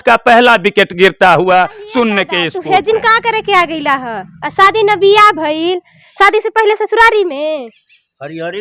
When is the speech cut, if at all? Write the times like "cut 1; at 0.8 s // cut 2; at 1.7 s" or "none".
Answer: cut 1; at 2.5 s